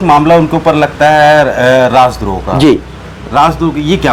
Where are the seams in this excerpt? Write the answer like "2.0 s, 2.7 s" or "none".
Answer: none